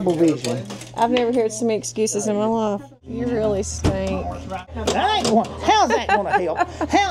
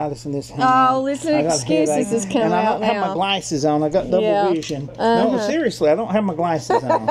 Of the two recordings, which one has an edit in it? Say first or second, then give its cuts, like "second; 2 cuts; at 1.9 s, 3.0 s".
first; 2 cuts; at 3.1 s, 4.7 s